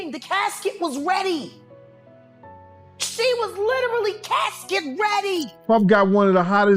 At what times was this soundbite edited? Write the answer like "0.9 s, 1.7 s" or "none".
5.5 s

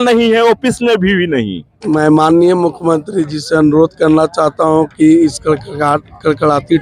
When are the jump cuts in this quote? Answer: 1.7 s

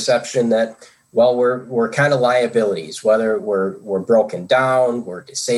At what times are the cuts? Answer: none

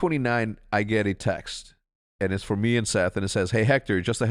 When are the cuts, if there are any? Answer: none

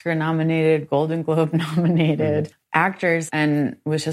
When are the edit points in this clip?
3.1 s

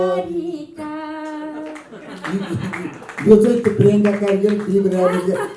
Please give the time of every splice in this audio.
none

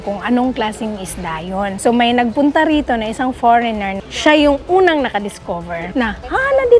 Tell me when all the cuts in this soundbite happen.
4.1 s, 5.8 s

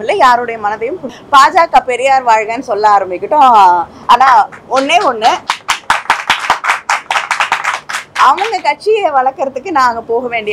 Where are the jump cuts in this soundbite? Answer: 1.1 s

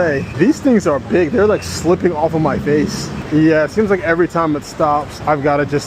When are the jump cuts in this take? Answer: 3.1 s

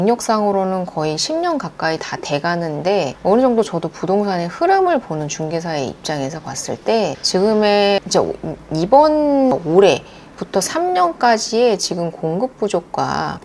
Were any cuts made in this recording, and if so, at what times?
none

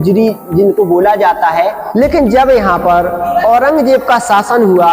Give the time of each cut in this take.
1.8 s

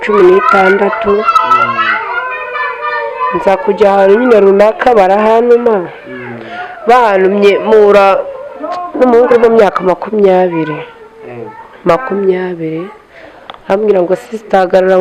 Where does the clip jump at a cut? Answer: none

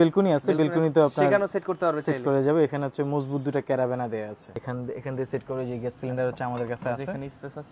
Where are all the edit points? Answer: 4.6 s

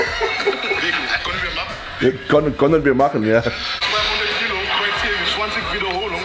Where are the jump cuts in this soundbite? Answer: 3.8 s

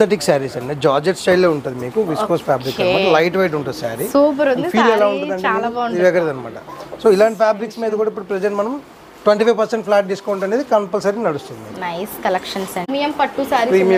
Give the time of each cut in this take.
none

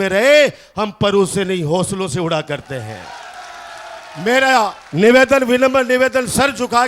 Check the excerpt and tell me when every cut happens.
none

